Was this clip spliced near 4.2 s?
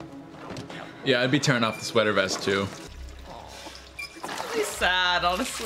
no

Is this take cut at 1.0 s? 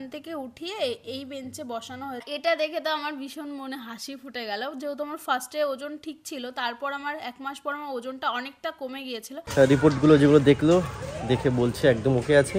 no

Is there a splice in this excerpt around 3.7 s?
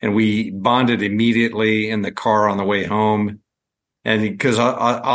no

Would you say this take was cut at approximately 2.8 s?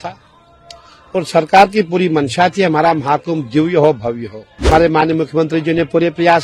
no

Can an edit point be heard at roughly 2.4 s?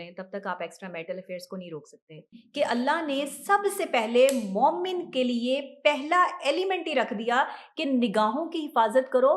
yes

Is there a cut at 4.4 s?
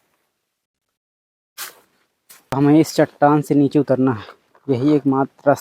no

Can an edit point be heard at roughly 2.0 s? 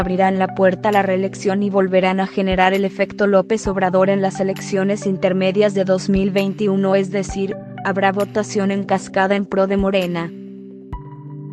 no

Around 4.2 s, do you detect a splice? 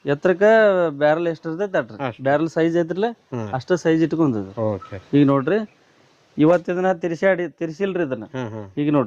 no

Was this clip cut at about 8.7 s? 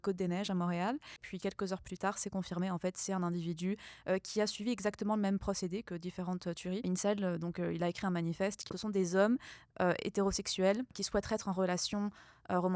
yes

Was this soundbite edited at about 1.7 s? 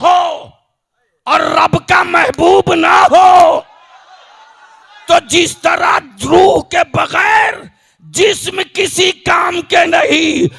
no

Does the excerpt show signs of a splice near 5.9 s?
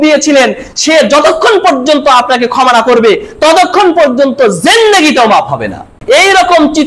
yes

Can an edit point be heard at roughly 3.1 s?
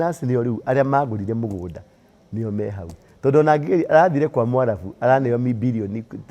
no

